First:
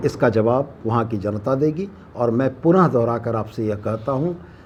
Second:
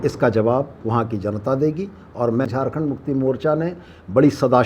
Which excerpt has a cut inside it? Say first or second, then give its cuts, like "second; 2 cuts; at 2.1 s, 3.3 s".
second; 1 cut; at 2.5 s